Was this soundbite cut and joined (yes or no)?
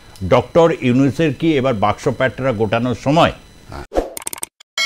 no